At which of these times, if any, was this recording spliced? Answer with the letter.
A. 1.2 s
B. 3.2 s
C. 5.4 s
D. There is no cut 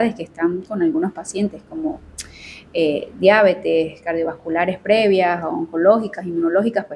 D